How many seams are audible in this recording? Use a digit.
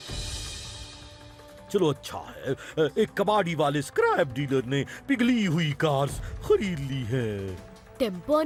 0